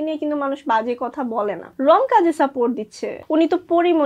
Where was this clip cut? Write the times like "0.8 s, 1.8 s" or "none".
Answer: 1.7 s, 3.1 s